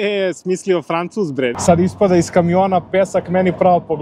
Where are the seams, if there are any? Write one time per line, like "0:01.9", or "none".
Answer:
0:01.5